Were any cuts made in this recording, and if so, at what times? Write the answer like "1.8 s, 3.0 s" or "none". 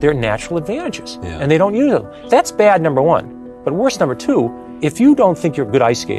2.1 s, 4.6 s